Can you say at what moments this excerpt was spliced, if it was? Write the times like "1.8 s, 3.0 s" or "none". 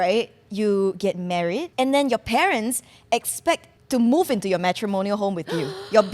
1.7 s, 3.7 s